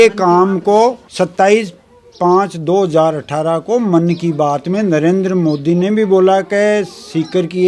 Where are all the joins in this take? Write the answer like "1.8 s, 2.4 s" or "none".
none